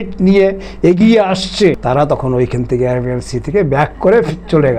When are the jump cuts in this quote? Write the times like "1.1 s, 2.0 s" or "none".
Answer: 1.8 s